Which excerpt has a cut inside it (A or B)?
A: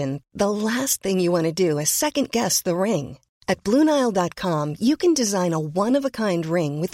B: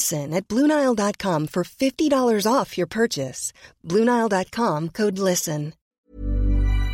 B